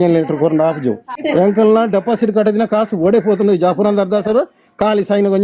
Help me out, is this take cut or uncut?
cut